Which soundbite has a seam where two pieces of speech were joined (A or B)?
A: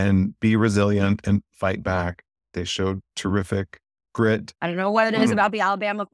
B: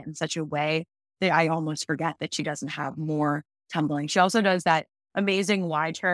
A